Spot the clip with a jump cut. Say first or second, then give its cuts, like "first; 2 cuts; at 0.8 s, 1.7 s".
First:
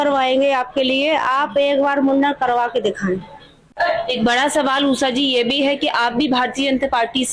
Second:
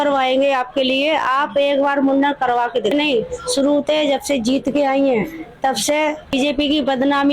second; 2 cuts; at 2.9 s, 6.3 s